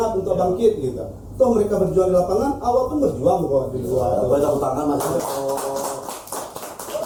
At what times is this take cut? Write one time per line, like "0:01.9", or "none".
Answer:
none